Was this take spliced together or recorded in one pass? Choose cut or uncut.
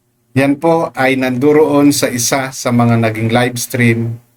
uncut